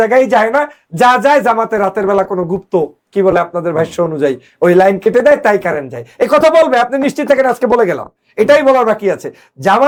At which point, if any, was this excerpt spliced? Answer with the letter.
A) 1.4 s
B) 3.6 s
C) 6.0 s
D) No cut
D